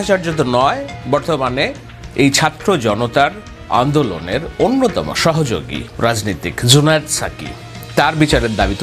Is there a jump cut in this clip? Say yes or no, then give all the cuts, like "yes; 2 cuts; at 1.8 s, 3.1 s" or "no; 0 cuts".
no; 0 cuts